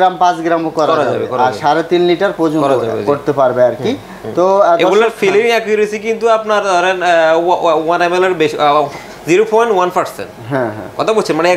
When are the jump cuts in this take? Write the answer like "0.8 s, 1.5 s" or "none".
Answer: none